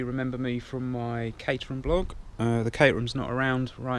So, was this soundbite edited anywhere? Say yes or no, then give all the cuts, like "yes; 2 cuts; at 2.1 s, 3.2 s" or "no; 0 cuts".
no; 0 cuts